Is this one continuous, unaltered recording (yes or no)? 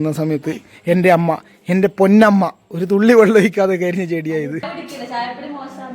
no